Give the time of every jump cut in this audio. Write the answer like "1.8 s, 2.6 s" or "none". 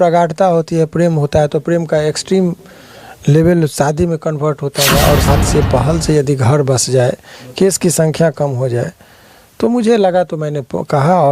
5.3 s